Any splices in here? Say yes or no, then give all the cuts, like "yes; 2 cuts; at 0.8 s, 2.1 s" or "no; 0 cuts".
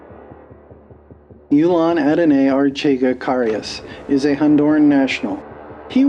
no; 0 cuts